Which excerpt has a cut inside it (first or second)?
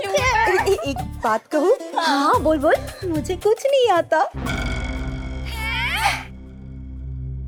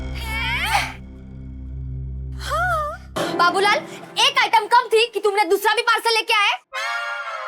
second